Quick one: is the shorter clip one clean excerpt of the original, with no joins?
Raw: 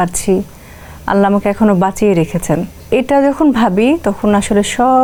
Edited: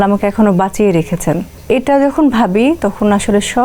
yes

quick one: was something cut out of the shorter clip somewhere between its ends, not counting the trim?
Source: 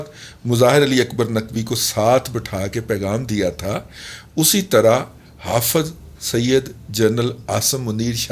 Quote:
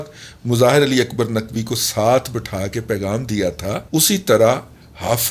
yes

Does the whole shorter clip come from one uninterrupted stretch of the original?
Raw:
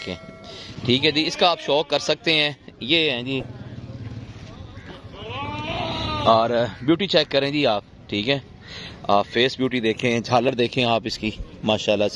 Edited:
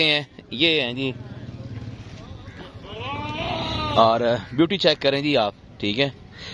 yes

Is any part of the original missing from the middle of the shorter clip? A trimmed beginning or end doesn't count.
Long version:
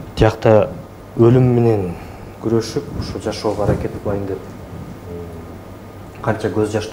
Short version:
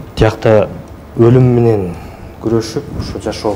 no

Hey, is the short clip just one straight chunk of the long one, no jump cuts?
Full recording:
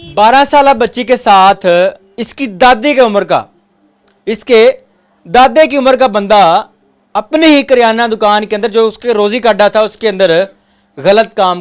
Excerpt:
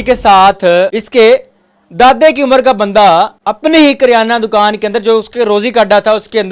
no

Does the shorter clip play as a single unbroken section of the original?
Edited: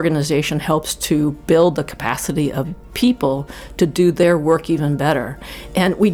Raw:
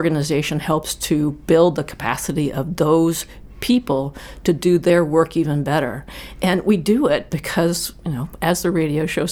no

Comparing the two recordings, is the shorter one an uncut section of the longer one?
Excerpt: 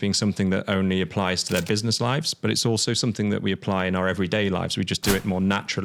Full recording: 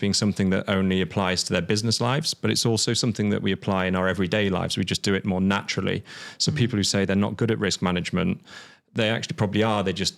yes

